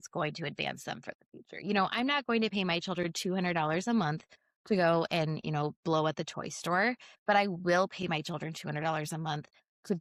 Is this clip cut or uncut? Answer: uncut